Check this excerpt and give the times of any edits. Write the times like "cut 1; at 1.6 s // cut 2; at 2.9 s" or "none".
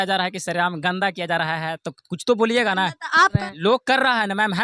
cut 1; at 3.4 s